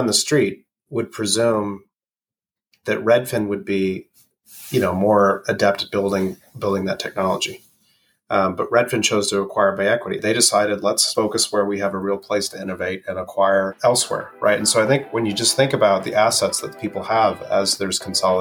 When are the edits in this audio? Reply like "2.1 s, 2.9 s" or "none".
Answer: 10.2 s, 11.1 s, 13.7 s